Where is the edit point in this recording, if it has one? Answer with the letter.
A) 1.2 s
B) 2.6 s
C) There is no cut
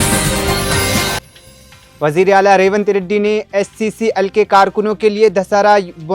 A